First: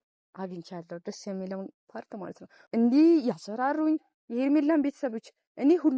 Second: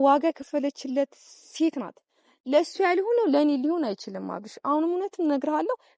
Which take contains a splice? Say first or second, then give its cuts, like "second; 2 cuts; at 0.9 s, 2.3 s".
first; 1 cut; at 2.5 s